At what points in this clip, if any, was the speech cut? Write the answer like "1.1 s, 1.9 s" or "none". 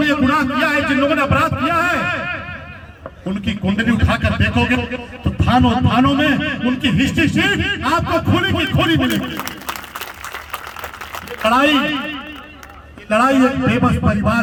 none